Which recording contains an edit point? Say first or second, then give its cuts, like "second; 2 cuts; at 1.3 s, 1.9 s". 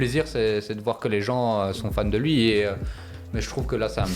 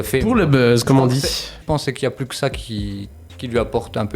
second; 1 cut; at 1.5 s